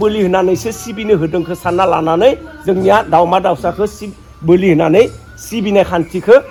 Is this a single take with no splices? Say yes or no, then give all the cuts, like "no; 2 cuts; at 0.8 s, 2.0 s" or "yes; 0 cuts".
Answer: yes; 0 cuts